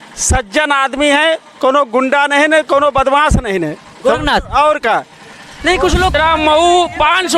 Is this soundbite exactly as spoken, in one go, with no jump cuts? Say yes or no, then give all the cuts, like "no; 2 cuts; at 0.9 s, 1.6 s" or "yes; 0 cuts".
no; 1 cut; at 6.1 s